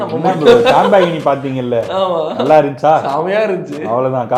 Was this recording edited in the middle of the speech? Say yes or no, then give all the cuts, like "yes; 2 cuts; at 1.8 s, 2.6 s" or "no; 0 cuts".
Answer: no; 0 cuts